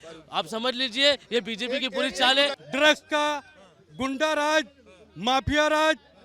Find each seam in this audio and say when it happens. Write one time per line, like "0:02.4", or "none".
0:02.5